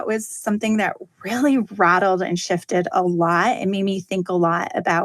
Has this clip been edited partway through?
no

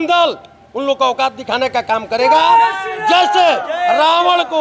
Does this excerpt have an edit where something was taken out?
no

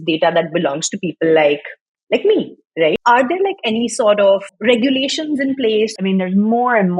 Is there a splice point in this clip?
yes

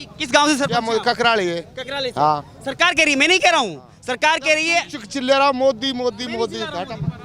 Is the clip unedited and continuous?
yes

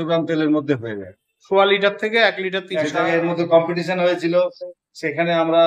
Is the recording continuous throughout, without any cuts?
no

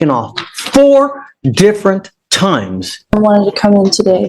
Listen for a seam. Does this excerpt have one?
yes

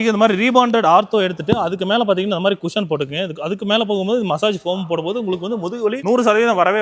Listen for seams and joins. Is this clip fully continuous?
yes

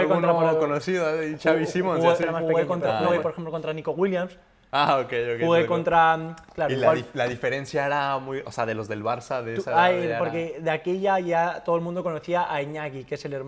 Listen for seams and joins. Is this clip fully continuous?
no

